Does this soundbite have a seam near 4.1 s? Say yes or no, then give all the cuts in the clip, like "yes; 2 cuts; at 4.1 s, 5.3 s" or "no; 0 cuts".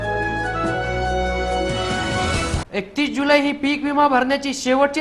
no; 1 cut; at 2.6 s